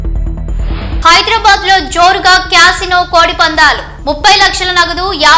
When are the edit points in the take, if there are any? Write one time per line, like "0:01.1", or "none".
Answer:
0:01.0